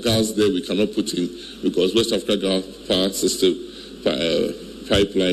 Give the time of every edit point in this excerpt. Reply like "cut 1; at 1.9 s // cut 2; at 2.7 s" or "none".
none